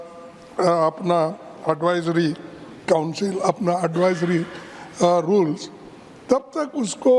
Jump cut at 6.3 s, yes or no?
no